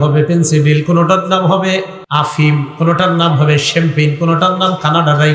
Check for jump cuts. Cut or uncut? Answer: cut